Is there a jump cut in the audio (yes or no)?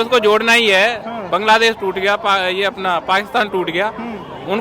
no